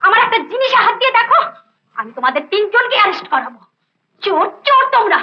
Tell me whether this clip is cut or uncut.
uncut